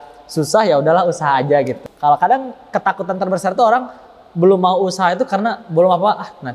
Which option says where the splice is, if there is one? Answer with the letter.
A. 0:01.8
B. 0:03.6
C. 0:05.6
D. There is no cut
A